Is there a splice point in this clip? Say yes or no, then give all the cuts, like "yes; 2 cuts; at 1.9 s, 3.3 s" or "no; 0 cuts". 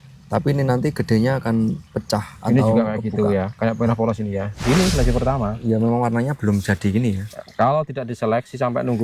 yes; 1 cut; at 4.5 s